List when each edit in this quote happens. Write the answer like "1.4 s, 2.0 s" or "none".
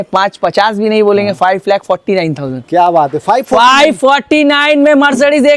none